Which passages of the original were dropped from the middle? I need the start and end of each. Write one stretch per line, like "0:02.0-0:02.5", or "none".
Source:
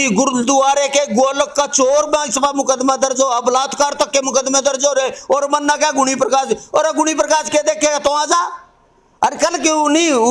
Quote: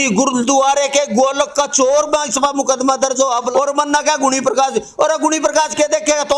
0:03.5-0:05.2